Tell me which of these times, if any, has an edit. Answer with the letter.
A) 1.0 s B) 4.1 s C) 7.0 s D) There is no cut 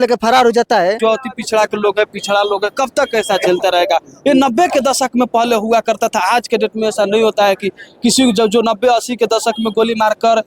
A